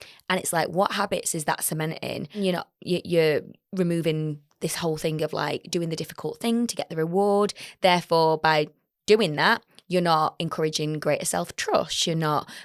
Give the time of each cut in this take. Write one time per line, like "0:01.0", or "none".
0:02.4